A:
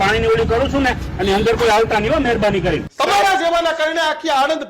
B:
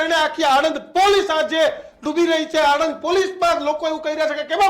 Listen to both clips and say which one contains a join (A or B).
A